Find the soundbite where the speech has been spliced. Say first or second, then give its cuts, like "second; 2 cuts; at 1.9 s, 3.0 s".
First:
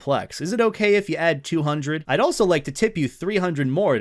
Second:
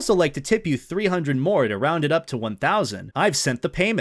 second; 1 cut; at 3.1 s